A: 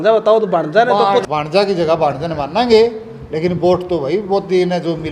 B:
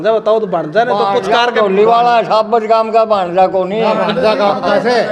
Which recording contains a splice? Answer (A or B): A